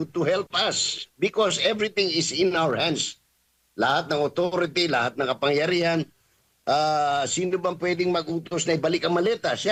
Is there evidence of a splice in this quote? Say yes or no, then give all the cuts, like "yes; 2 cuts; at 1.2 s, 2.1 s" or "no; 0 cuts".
no; 0 cuts